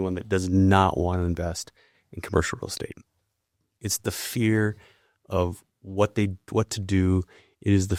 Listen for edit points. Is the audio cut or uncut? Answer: uncut